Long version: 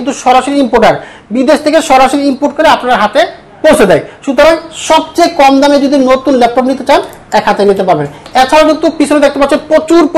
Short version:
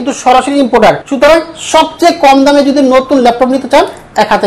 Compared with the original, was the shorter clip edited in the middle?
yes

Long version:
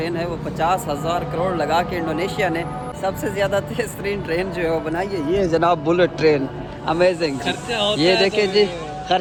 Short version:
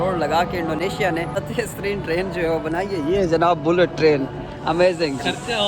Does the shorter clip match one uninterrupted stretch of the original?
no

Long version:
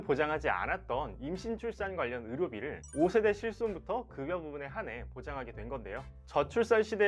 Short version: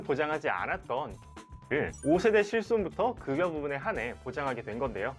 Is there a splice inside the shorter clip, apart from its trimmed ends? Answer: yes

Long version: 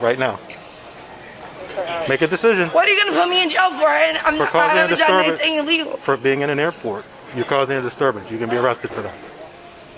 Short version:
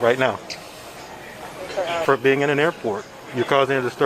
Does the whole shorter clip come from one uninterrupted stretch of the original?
no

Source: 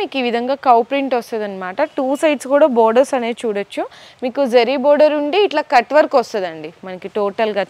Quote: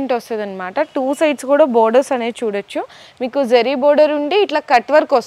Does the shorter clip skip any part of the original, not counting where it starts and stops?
no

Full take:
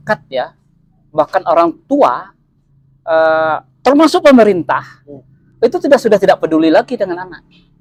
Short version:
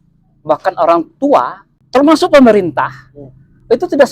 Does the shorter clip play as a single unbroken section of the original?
no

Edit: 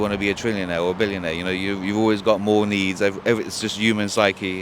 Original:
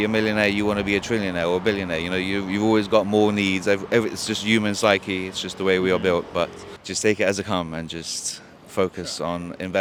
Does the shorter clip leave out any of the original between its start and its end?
no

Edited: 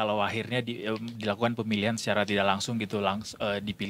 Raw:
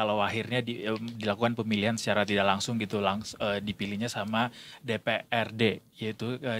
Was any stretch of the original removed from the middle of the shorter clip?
no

